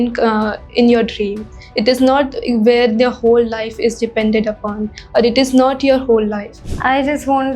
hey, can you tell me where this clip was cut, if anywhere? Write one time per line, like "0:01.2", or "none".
0:06.7